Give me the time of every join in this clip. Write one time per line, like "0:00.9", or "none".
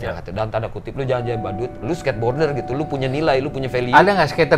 0:01.8